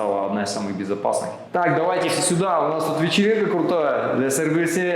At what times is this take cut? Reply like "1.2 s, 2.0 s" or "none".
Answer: 1.4 s